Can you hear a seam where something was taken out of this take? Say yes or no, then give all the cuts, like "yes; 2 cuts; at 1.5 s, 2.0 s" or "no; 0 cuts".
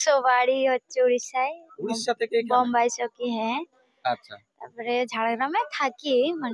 no; 0 cuts